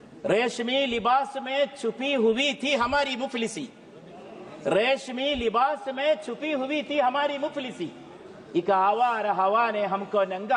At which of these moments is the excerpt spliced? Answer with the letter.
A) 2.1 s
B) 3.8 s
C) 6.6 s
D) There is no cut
D